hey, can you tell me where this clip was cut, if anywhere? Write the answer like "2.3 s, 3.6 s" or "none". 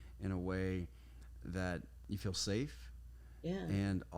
1.9 s